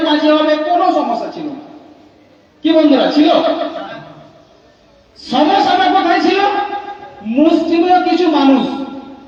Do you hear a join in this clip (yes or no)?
no